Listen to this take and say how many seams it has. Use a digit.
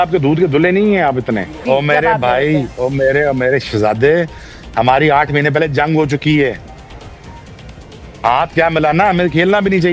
1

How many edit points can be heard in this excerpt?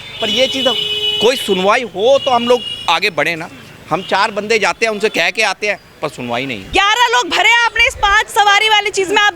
1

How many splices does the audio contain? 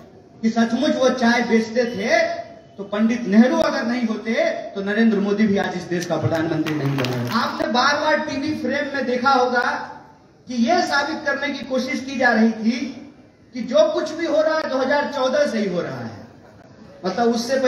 1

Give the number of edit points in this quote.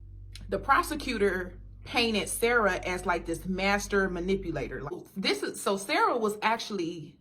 1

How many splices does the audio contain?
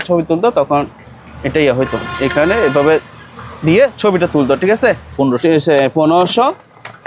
1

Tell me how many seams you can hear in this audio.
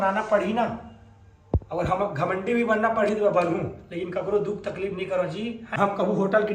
1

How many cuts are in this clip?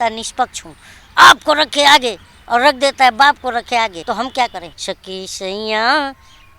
2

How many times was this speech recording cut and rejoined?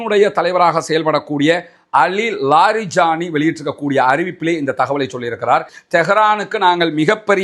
1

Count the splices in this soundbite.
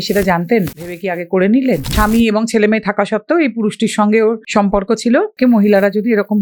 4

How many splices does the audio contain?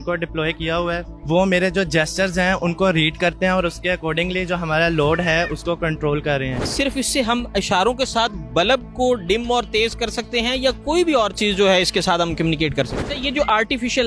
2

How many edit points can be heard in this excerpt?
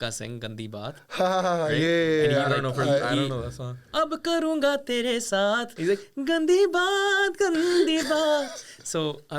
1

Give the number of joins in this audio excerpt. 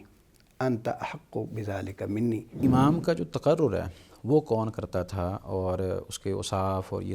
1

